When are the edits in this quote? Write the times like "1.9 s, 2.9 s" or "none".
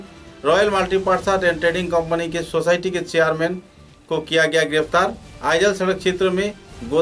none